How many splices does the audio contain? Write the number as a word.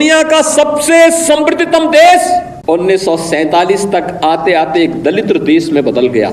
one